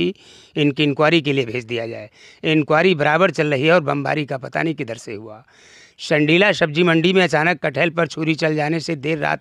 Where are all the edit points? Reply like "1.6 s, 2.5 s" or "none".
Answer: none